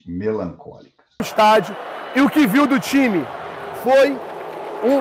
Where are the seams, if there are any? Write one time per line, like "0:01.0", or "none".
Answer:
0:01.3